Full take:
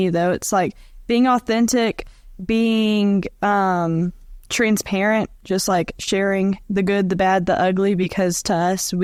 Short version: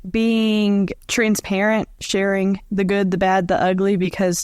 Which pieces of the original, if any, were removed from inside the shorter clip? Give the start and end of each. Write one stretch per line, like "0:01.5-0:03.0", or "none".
0:03.3-0:04.4
0:05.4-0:06.0